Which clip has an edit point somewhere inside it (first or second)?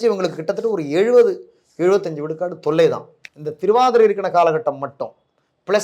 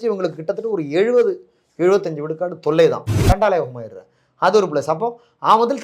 second